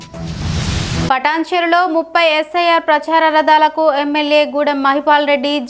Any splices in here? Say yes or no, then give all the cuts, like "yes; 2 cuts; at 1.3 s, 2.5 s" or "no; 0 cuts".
yes; 1 cut; at 1.0 s